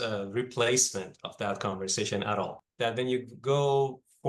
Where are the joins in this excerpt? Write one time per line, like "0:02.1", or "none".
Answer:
0:02.6